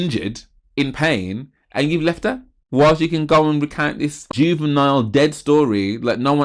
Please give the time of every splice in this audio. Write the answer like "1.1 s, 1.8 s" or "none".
2.5 s, 4.3 s